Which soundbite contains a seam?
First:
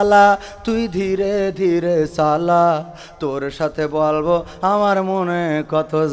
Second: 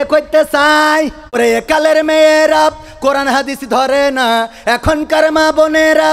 second; 1 cut; at 1.4 s

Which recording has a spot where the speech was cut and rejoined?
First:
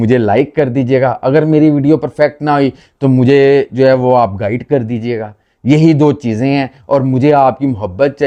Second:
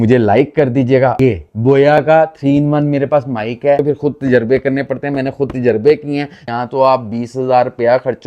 second; 3 cuts; at 1.2 s, 3.8 s, 6.4 s

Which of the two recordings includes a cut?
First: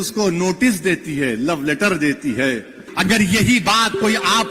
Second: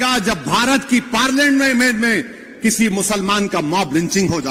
first; 1 cut; at 2.9 s

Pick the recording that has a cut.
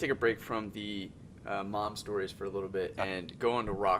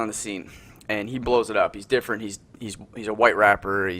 second; 1 cut; at 1.1 s

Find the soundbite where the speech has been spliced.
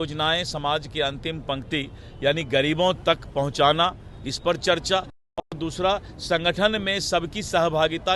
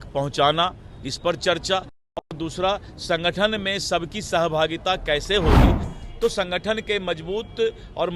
second; 1 cut; at 5.9 s

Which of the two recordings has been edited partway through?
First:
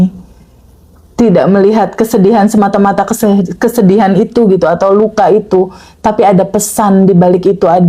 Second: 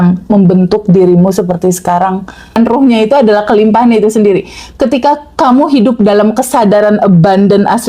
second; 1 cut; at 2.6 s

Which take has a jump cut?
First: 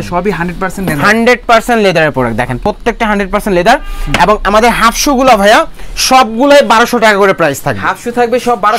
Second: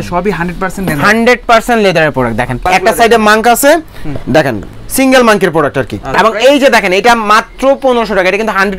second; 2 cuts; at 2.5 s, 6.1 s

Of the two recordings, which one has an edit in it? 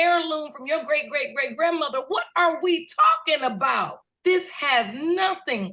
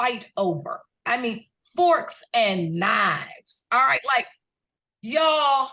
first; 1 cut; at 4.1 s

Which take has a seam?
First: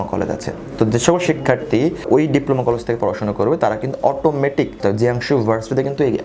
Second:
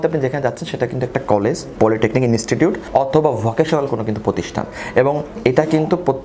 first; 2 cuts; at 2.0 s, 4.7 s

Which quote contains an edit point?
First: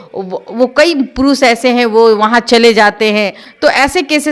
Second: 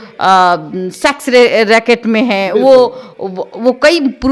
first; 1 cut; at 3.4 s

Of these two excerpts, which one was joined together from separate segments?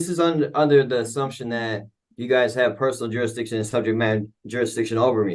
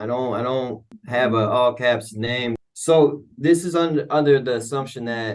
second; 2 cuts; at 0.9 s, 2.6 s

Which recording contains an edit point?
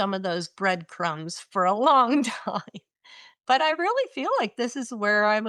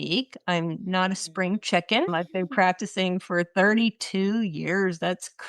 second; 1 cut; at 2.1 s

